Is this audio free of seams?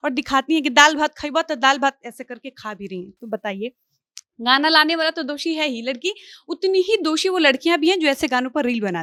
yes; 0 cuts

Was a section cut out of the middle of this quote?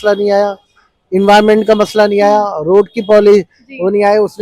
no; 0 cuts

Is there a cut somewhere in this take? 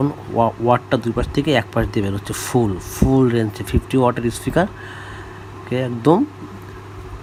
no; 0 cuts

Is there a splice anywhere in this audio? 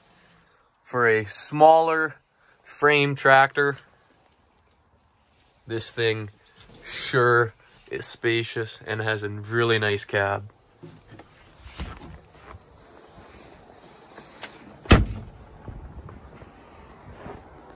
no; 0 cuts

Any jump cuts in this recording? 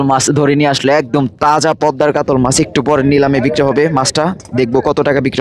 no; 0 cuts

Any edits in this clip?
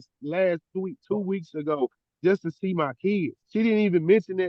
yes; 1 cut; at 3.4 s

